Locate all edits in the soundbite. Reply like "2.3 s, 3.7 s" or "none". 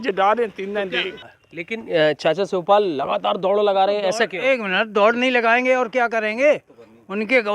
1.2 s